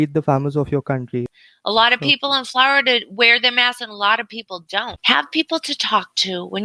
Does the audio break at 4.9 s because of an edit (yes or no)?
yes